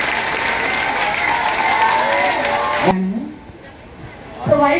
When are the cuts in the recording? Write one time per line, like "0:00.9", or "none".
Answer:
0:02.9